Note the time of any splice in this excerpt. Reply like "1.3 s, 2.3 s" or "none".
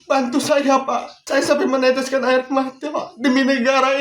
1.1 s